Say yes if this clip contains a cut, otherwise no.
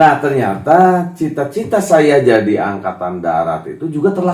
no